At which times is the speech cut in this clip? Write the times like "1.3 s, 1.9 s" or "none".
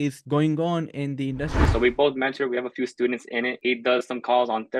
1.6 s, 3.6 s